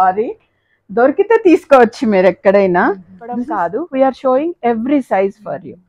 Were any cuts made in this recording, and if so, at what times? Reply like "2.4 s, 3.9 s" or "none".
3.5 s